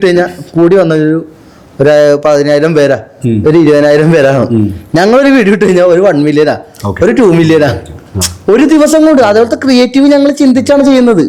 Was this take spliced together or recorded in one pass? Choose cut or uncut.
uncut